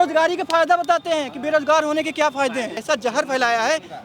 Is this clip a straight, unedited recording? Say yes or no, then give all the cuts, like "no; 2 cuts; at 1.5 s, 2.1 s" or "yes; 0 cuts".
no; 1 cut; at 2.7 s